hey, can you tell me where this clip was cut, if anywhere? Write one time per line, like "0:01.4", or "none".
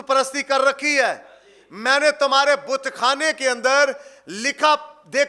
none